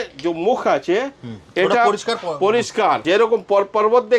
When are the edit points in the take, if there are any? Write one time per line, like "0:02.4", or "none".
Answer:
0:03.0